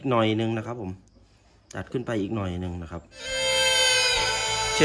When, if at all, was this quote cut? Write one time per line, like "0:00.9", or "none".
0:03.3